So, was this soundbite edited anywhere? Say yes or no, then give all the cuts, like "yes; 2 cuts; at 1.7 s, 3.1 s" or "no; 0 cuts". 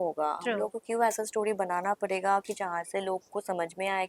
no; 0 cuts